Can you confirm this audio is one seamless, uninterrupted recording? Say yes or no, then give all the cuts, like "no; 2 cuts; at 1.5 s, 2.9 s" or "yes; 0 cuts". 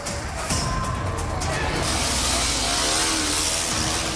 yes; 0 cuts